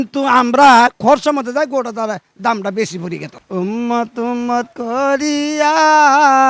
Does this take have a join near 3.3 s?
yes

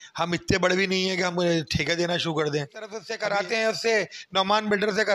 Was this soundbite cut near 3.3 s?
yes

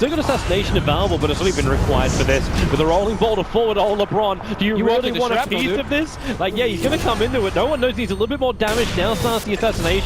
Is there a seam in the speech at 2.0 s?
no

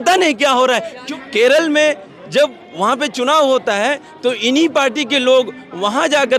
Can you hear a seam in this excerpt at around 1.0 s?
yes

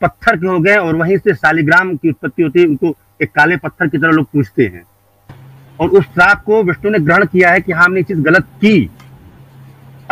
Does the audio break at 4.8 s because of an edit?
no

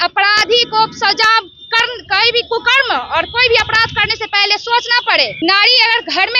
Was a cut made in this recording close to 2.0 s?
no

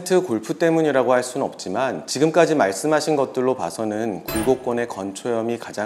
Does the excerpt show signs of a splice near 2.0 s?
yes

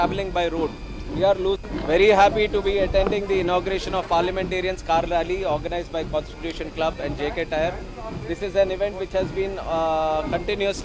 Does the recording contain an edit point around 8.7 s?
no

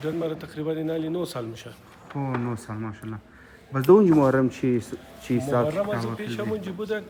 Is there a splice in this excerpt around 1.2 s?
no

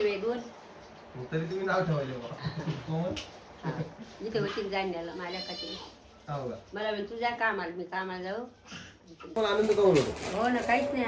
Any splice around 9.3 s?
yes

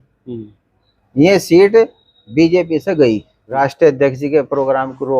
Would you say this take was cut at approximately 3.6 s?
yes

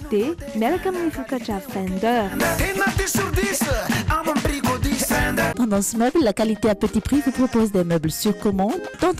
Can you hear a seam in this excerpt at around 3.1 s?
no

